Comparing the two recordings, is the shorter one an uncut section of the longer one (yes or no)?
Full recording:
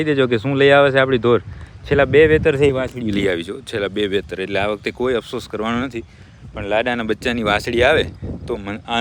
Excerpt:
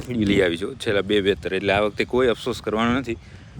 yes